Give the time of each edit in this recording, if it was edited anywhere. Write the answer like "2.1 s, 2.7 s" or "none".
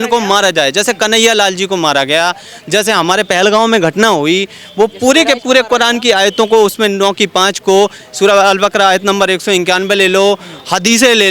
none